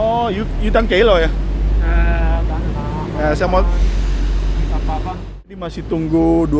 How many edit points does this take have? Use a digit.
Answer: 1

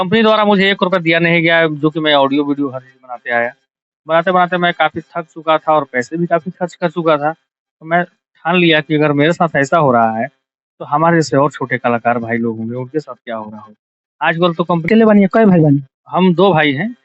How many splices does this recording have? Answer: 1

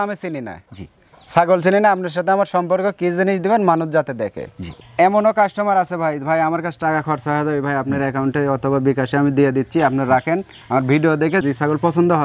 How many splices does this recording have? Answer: 1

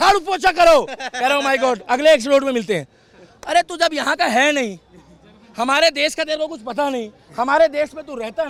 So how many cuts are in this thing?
0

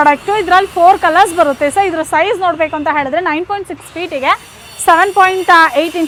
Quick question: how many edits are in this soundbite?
0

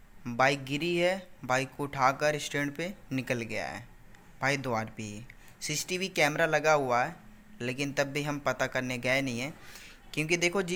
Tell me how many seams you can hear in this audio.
0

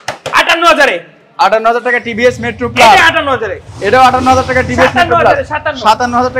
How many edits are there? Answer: 0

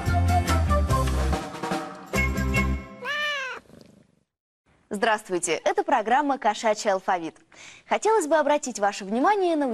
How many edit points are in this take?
1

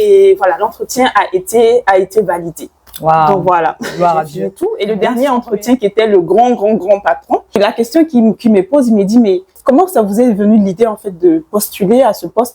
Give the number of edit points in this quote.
3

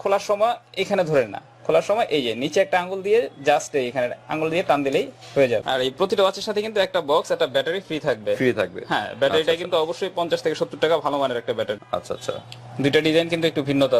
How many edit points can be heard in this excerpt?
2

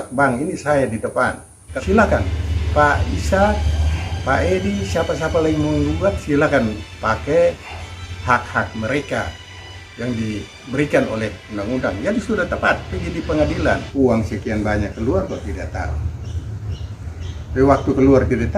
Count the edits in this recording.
2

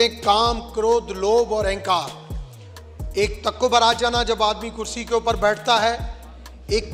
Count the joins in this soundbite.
0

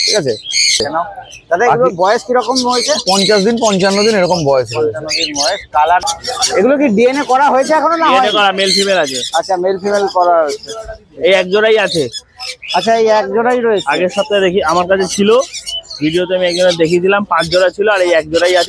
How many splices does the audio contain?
2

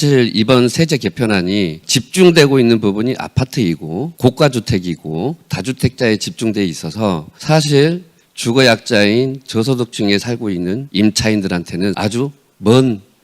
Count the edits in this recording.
5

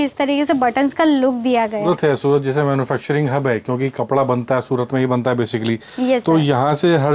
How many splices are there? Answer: 1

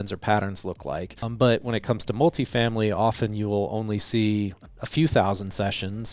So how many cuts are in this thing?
2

